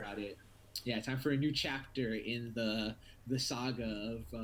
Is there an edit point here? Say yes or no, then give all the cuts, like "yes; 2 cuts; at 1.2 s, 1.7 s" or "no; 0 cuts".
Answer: no; 0 cuts